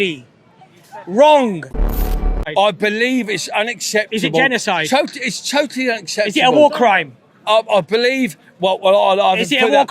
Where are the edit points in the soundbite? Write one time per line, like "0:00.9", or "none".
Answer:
0:02.0